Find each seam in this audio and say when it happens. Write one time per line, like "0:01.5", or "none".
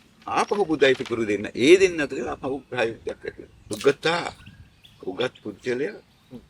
0:03.7